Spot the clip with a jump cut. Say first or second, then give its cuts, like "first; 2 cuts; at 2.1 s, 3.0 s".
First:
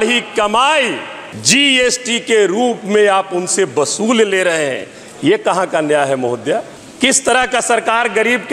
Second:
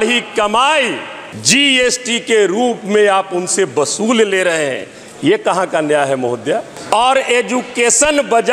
second; 1 cut; at 6.7 s